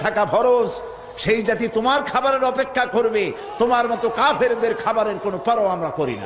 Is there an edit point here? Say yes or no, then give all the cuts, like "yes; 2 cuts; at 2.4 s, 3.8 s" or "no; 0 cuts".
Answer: no; 0 cuts